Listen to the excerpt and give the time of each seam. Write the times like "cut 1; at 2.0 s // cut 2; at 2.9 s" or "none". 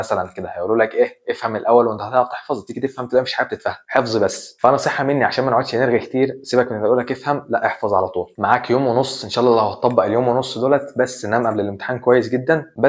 none